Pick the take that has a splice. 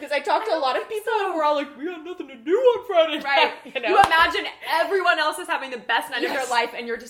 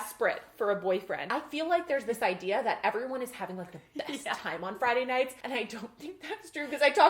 second; 2 cuts; at 1.2 s, 5.3 s

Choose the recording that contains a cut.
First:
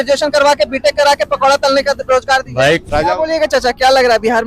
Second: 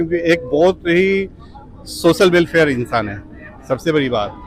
first; 1 cut; at 2.9 s

